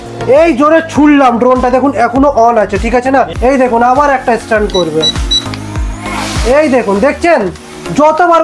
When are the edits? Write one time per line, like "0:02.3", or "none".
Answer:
0:03.3

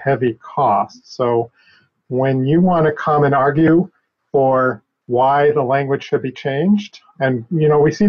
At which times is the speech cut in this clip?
none

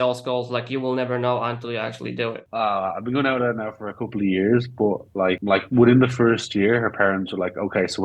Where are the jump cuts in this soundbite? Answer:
0:02.4
0:05.4

